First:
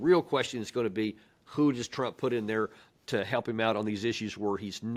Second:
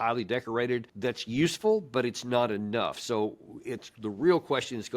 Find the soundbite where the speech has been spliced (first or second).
second